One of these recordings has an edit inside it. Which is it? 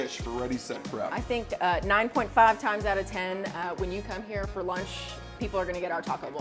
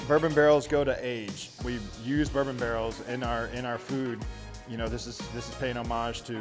second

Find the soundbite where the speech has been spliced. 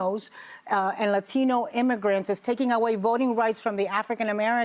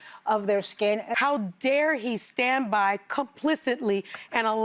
second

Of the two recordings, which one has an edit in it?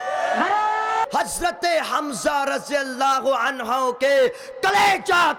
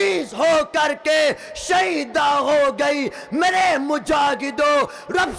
first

